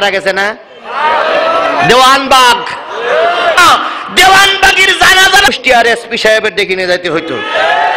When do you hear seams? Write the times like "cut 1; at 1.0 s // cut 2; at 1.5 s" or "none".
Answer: cut 1; at 3.6 s // cut 2; at 5.5 s